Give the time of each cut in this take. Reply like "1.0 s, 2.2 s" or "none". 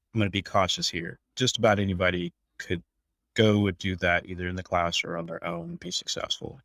1.2 s